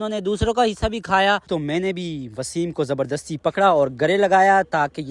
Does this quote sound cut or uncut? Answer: cut